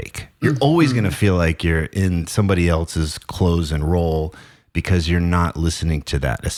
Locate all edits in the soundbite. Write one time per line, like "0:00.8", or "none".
none